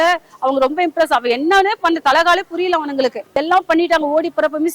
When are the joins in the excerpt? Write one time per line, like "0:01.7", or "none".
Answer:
0:03.2